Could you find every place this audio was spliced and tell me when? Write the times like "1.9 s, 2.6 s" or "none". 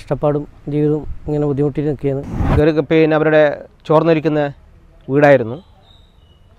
2.4 s